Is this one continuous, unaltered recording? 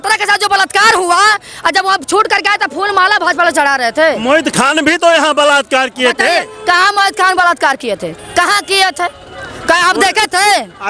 yes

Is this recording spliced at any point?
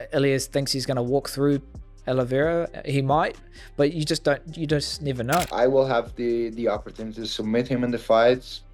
yes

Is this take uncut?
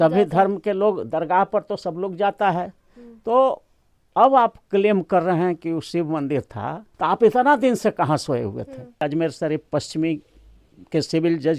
no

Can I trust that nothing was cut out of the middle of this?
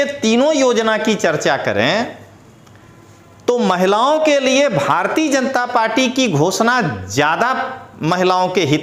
yes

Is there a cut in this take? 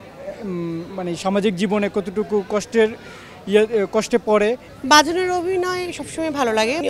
yes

